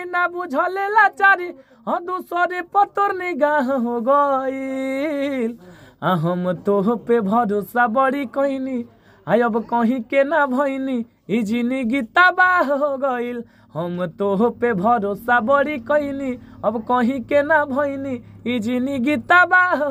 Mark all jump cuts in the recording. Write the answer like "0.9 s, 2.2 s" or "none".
none

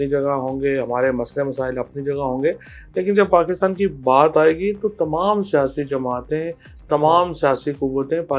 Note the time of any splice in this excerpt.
none

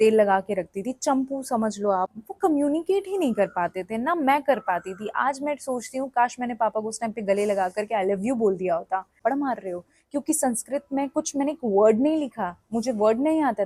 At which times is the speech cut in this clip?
2.2 s, 9.1 s

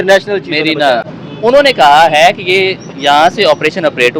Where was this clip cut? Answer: 1.2 s

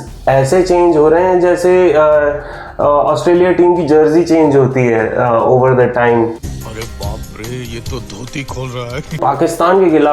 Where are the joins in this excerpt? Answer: 6.5 s, 9.2 s

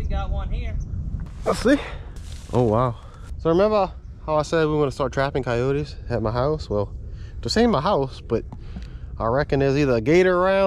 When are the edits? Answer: 1.3 s

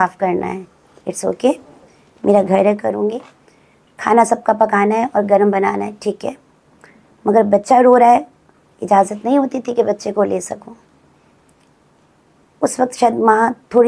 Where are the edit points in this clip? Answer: none

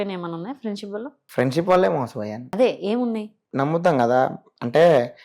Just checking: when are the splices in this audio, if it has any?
3.4 s

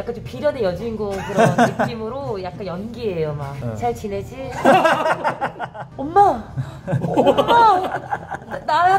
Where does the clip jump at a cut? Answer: 3.6 s

